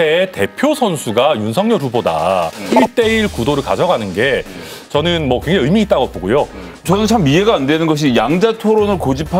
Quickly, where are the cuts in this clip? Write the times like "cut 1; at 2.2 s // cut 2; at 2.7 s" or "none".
cut 1; at 2.7 s // cut 2; at 6.7 s